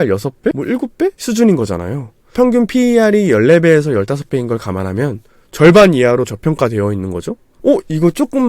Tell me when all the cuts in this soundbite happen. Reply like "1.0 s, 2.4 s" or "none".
2.3 s